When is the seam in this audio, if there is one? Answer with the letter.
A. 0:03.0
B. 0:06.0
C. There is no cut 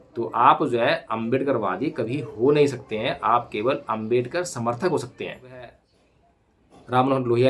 B